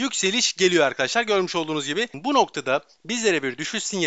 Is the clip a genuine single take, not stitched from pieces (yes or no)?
no